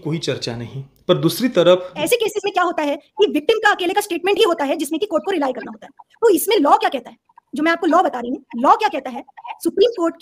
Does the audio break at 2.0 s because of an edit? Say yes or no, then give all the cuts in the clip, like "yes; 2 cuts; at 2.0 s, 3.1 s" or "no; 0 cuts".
yes; 1 cut; at 2.0 s